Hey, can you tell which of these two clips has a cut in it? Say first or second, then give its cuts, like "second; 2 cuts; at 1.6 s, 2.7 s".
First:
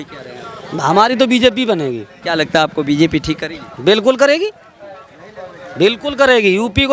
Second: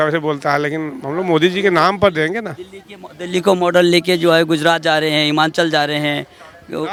first; 1 cut; at 2.1 s